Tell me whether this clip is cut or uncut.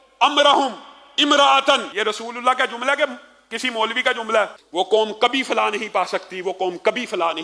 cut